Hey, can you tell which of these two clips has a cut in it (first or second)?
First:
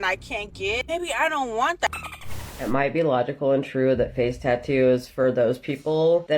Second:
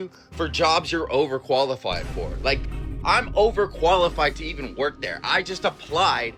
first